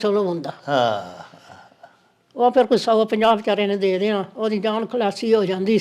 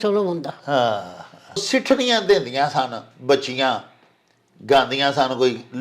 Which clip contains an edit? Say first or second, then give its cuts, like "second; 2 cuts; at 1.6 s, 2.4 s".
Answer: second; 1 cut; at 1.6 s